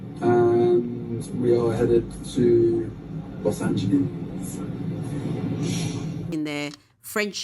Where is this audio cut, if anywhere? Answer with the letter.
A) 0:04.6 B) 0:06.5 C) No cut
B